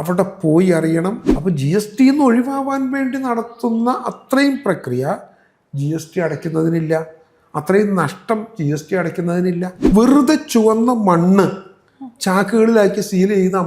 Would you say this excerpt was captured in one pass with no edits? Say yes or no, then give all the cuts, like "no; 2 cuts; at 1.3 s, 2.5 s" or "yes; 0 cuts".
no; 2 cuts; at 1.3 s, 9.7 s